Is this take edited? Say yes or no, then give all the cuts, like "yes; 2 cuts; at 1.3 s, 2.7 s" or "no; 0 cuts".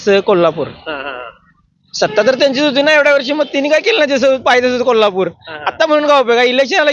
no; 0 cuts